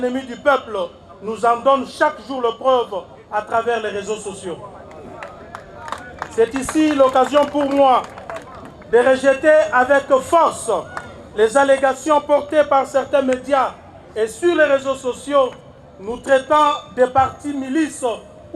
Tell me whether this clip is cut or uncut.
uncut